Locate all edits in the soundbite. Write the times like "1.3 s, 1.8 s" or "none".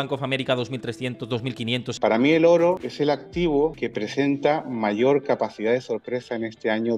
1.9 s, 2.9 s, 3.8 s